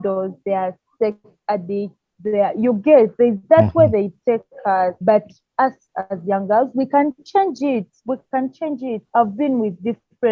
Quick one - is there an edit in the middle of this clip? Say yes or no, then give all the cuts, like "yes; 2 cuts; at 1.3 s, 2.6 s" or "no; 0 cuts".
yes; 2 cuts; at 5.0 s, 9.0 s